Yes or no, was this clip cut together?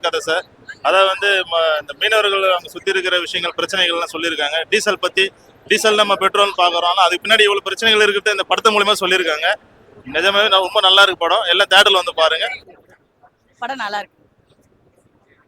yes